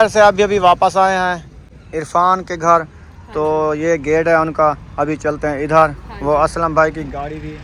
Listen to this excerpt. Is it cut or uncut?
uncut